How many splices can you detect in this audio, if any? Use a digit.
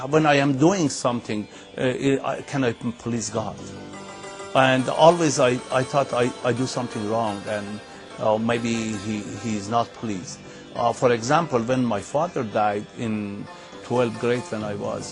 1